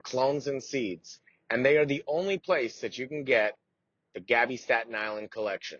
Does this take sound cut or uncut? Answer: uncut